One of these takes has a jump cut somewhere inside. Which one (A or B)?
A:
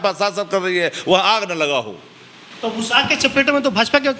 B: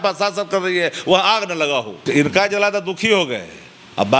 B